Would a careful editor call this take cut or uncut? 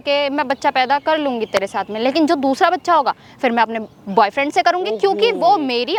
uncut